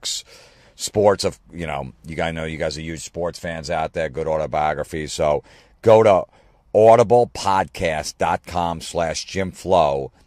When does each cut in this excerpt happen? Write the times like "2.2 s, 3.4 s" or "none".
1.5 s